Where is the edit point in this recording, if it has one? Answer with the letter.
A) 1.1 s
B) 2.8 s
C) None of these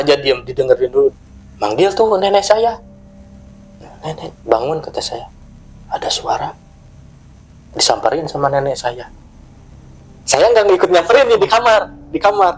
A